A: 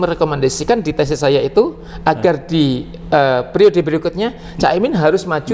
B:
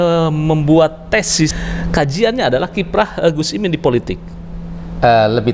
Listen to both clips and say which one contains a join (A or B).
B